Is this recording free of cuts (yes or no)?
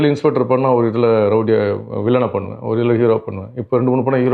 yes